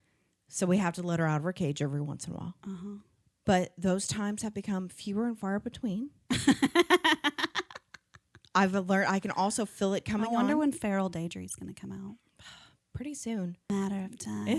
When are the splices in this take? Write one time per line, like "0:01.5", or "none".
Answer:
0:13.7